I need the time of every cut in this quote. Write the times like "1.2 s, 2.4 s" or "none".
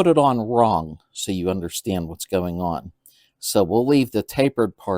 1.1 s